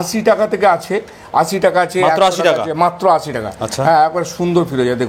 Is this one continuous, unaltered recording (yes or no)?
yes